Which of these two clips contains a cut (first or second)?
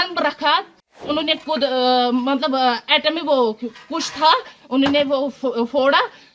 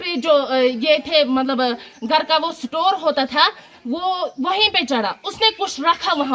first